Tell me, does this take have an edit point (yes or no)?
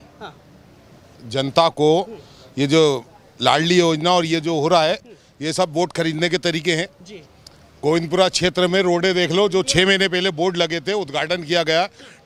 no